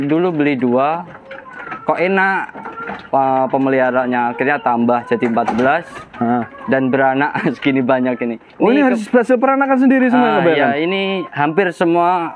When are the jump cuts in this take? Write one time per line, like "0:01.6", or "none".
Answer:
none